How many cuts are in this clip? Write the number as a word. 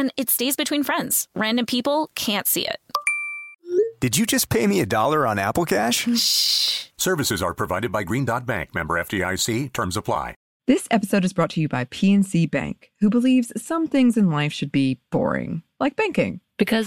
one